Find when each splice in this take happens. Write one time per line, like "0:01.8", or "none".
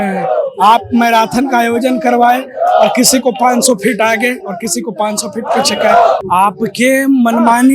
0:06.2